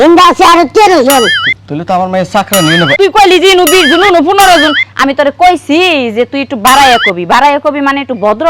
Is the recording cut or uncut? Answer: cut